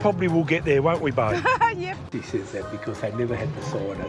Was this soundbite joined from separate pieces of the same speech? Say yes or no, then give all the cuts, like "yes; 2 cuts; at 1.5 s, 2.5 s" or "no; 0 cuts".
yes; 1 cut; at 2.0 s